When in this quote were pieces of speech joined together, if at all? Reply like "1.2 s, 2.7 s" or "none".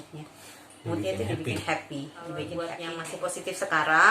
2.5 s